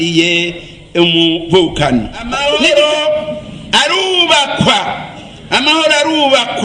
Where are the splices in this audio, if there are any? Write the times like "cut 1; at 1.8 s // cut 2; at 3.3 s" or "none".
cut 1; at 2.3 s